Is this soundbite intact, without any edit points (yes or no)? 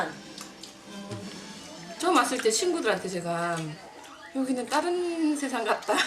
no